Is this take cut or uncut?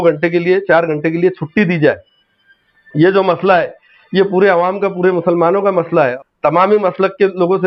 cut